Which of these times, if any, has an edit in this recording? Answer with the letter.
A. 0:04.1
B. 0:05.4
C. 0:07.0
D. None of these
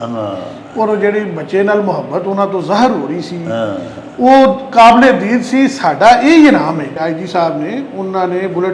C